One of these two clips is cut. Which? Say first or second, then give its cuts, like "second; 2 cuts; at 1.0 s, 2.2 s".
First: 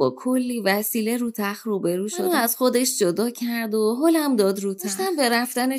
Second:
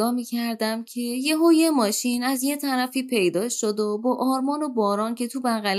first; 2 cuts; at 2.2 s, 5.0 s